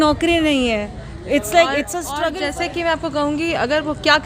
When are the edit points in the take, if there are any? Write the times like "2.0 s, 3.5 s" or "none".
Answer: 2.1 s